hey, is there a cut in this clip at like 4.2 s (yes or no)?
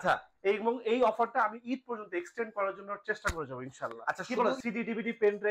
yes